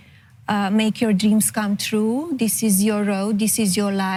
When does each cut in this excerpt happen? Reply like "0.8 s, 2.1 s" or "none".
none